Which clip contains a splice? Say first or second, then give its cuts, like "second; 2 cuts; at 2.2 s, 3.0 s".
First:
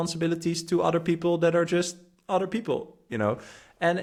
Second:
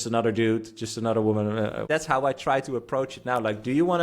second; 1 cut; at 1.9 s